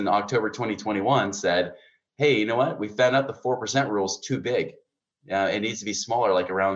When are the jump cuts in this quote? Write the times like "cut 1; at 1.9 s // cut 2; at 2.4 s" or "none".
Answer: none

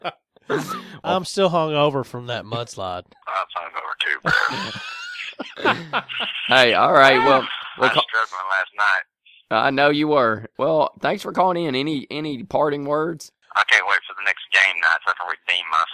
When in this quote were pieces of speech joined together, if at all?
cut 1; at 1.0 s // cut 2; at 3.1 s // cut 3; at 10.5 s

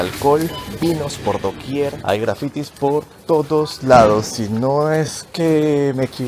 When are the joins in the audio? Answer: cut 1; at 2.0 s

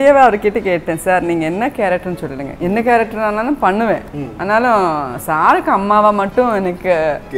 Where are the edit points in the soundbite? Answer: none

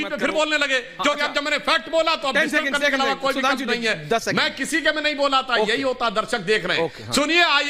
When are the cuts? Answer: none

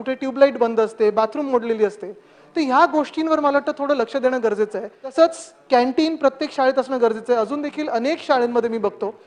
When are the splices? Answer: cut 1; at 5.1 s

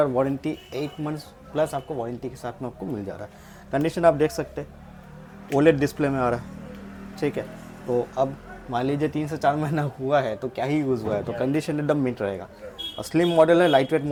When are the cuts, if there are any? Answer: none

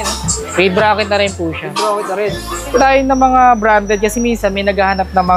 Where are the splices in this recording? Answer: cut 1; at 2.8 s

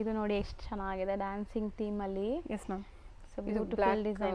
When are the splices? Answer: none

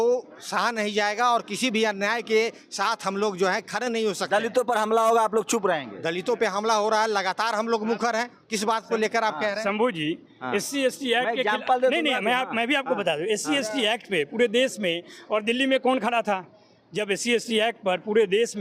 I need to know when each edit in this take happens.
none

